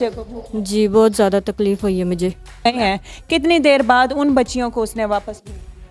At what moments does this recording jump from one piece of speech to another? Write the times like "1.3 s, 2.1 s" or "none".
2.7 s

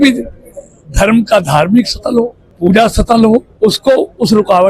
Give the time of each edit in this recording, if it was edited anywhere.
2.4 s, 3.5 s

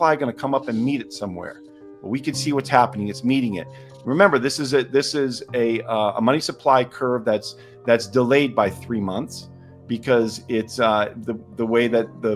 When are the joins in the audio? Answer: none

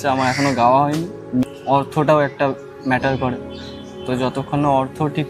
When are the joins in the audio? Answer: 1.5 s

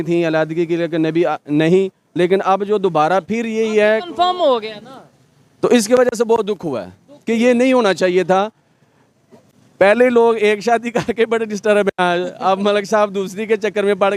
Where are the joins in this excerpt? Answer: none

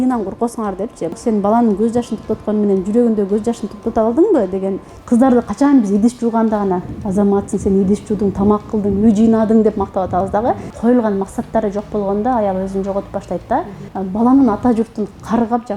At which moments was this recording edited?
1.1 s, 4.9 s, 10.7 s, 13.8 s

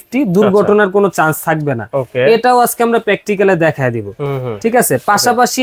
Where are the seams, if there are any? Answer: none

